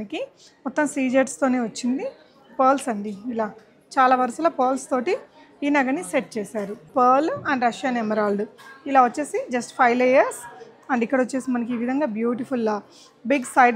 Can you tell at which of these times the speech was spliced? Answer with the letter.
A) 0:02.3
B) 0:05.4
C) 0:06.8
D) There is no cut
C